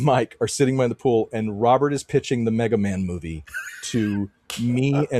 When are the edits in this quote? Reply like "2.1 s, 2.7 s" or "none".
none